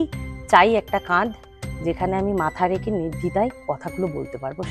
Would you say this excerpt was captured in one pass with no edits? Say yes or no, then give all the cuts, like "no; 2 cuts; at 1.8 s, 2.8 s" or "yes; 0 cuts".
yes; 0 cuts